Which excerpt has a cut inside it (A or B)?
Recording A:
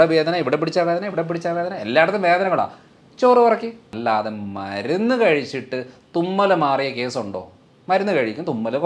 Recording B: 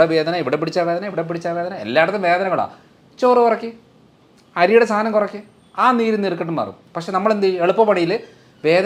A